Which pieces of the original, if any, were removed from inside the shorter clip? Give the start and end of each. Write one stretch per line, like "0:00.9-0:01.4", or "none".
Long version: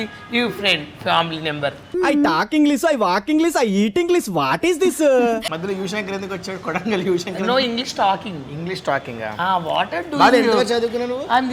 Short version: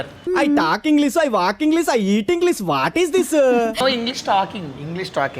0:05.5-0:07.5

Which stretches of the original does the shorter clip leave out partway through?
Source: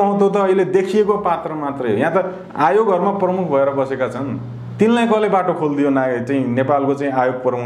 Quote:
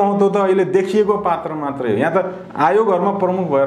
none

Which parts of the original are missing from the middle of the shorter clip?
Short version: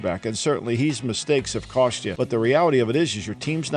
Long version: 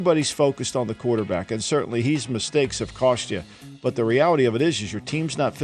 0:03.3-0:03.7

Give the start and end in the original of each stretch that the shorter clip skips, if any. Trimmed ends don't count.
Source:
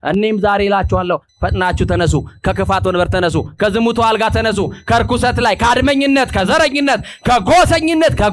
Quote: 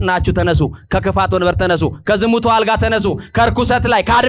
none

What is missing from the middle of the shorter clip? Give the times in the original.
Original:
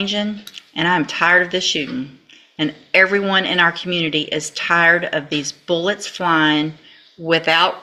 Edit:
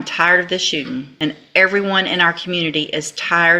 0:02.1-0:02.5

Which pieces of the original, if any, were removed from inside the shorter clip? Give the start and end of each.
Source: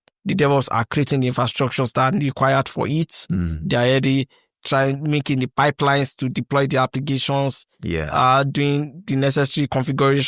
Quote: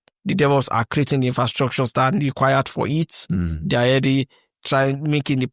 none

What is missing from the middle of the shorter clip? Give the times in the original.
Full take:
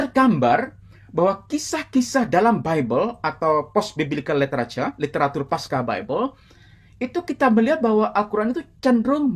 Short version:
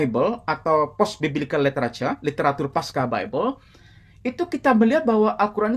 none

